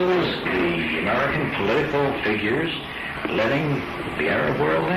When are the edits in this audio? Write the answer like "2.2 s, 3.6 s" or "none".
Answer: 0.9 s